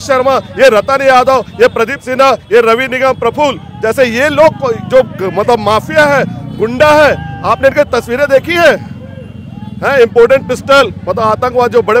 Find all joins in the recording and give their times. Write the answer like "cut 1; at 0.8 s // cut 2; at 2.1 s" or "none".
none

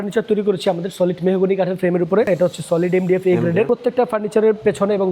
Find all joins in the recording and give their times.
cut 1; at 2.3 s // cut 2; at 3.7 s

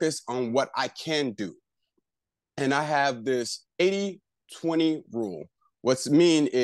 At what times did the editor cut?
none

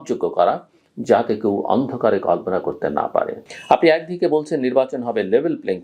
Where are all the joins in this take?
cut 1; at 3.4 s

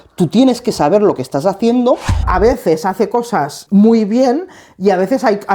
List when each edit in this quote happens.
cut 1; at 2.3 s // cut 2; at 3.6 s

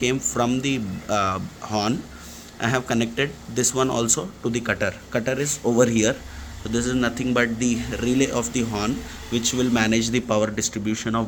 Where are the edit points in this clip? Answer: none

